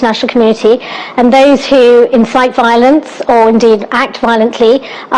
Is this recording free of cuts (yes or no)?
yes